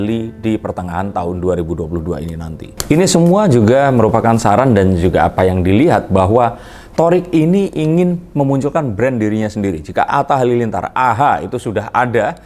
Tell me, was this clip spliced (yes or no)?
no